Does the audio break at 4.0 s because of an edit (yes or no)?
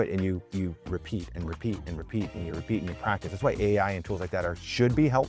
no